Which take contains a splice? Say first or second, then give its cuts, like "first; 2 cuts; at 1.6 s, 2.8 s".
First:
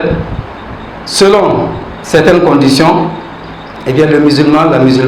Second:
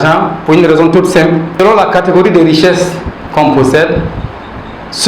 second; 1 cut; at 1.6 s